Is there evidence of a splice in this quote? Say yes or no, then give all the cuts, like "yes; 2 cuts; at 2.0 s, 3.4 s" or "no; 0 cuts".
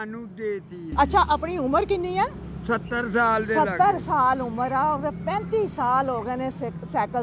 yes; 1 cut; at 0.9 s